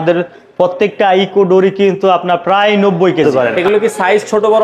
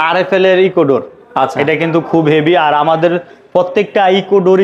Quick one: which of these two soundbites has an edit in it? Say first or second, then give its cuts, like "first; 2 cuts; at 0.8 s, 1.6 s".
first; 1 cut; at 3.2 s